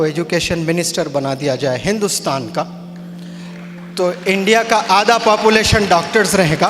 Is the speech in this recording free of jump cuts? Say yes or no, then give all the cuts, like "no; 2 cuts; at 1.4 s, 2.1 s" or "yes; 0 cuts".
yes; 0 cuts